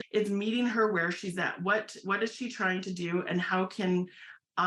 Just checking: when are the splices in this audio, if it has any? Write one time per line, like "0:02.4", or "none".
none

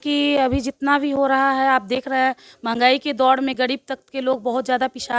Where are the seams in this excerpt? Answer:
none

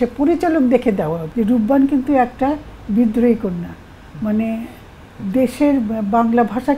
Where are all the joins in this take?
0:01.2

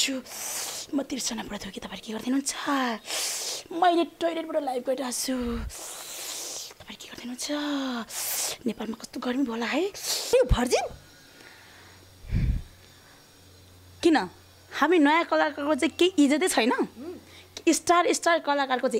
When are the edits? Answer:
0:10.3

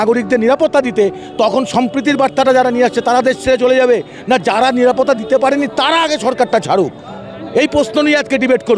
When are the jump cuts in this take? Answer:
none

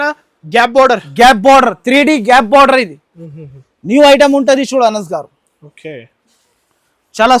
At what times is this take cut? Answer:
none

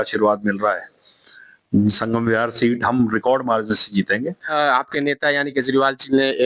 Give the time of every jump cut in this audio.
0:04.5

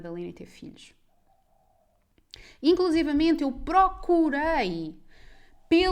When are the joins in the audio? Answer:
none

